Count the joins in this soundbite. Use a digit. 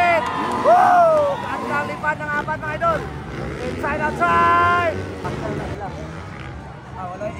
1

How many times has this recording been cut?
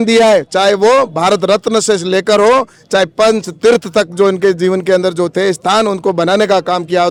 0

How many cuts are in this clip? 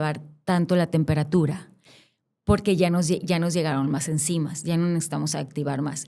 0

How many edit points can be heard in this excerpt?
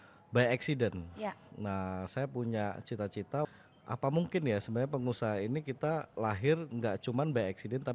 1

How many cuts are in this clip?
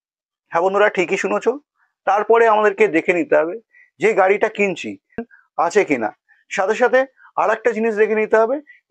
1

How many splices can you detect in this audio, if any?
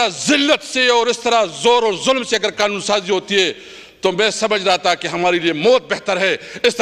0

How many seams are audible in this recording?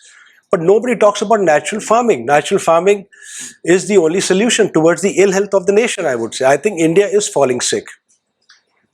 0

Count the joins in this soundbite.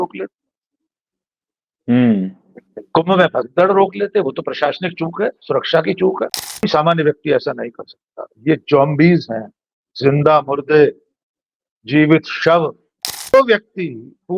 2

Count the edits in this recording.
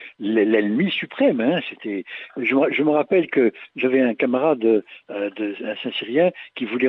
0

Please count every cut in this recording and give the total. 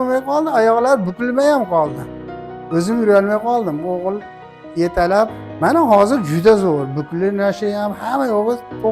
2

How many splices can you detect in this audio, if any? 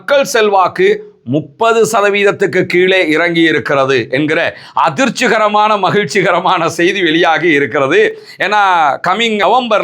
0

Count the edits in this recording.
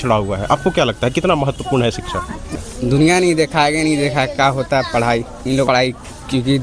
2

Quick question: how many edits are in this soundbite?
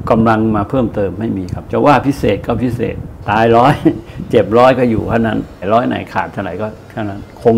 3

